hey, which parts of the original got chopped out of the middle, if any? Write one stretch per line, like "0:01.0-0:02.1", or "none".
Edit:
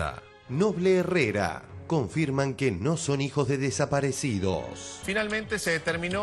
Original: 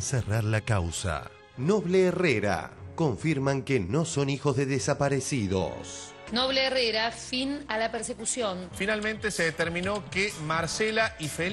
0:06.0-0:08.7